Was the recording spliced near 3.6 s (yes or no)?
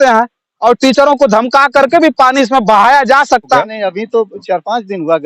yes